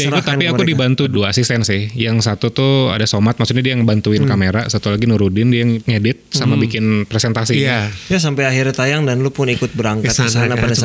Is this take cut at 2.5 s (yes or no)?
no